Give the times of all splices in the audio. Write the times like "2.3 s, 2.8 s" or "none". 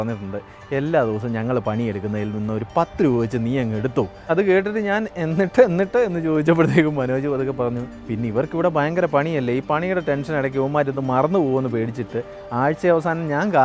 none